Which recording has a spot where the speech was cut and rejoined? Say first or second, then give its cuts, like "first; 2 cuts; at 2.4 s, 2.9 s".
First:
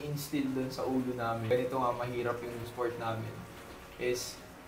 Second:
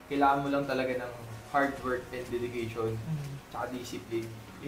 first; 2 cuts; at 1.5 s, 2.7 s